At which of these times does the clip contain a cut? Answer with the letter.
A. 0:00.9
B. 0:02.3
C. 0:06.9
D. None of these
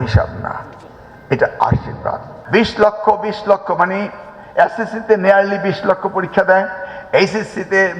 B